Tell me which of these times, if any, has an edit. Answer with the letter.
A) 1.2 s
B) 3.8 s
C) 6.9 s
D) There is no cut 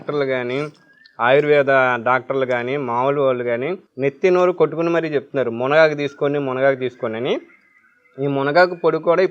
B